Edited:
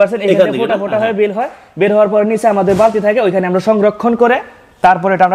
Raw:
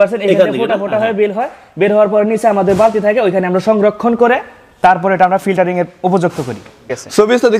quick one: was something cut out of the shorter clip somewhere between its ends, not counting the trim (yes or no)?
no